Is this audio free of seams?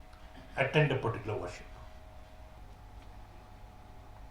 no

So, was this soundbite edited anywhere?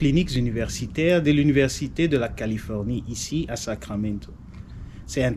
no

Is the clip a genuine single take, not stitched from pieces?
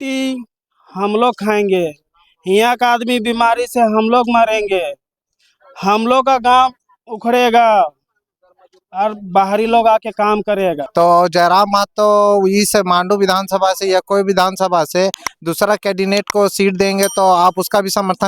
no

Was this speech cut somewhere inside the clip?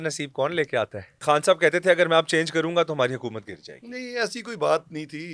yes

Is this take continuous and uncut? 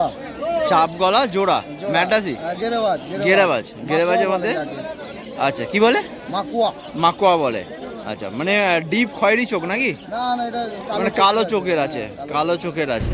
yes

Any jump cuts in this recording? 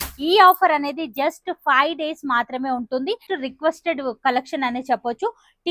yes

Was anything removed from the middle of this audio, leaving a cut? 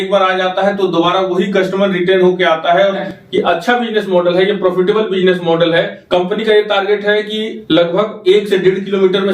yes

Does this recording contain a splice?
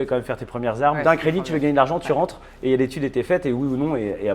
yes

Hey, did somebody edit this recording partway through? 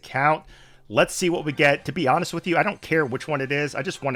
no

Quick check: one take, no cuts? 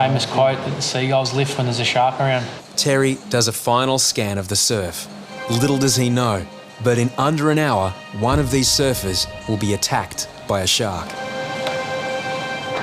no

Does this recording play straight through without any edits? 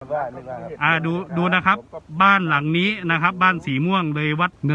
yes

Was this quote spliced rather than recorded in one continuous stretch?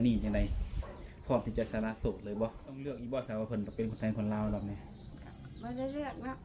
yes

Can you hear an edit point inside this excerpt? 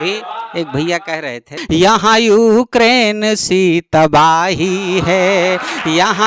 yes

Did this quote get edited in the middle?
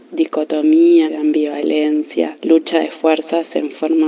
no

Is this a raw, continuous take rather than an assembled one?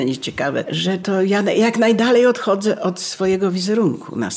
no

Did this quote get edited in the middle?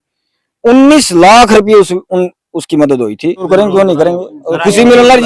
yes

